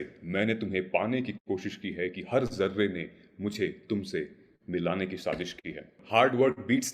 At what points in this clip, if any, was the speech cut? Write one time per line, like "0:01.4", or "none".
0:06.0